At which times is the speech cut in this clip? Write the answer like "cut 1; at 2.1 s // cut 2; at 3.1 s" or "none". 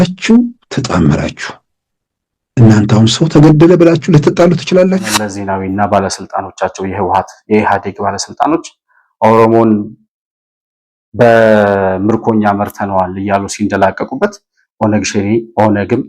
cut 1; at 5.4 s